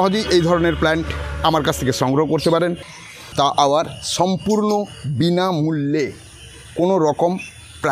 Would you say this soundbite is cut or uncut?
cut